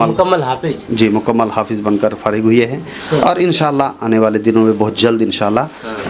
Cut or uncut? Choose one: uncut